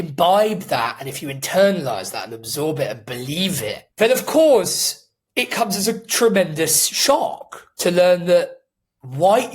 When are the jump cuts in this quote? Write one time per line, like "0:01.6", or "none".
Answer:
0:03.8